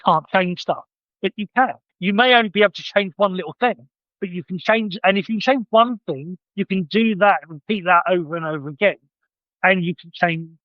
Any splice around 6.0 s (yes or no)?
no